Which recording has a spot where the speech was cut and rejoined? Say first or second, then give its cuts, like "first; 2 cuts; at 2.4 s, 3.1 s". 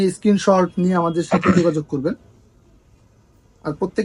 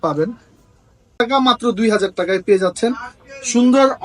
second; 1 cut; at 1.1 s